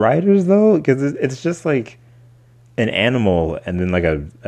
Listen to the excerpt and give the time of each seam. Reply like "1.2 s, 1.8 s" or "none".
none